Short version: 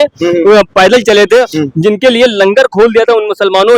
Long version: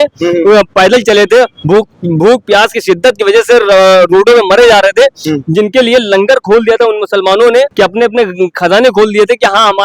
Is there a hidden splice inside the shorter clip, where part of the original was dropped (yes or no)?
yes